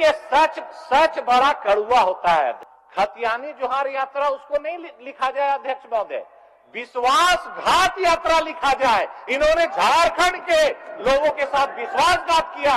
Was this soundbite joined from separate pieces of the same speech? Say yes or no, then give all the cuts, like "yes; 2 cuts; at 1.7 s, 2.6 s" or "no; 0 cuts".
yes; 1 cut; at 2.7 s